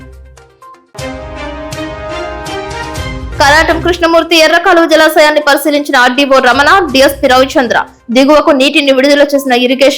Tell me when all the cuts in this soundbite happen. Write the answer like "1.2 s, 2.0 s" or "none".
2.8 s